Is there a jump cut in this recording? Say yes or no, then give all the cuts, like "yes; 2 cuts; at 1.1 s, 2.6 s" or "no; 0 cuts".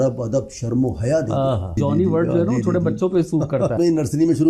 yes; 2 cuts; at 1.8 s, 3.8 s